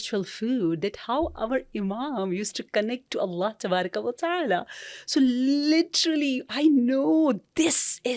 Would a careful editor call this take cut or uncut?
uncut